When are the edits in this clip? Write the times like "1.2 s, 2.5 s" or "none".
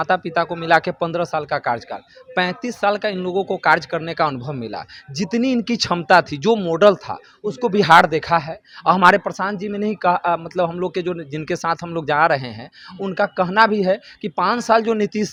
none